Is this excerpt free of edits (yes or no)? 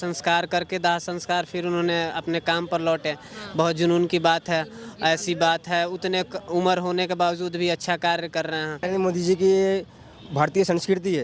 no